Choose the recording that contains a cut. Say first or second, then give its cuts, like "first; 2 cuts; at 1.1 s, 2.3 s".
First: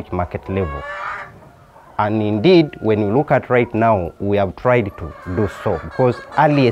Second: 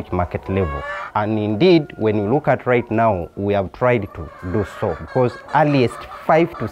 second; 1 cut; at 0.9 s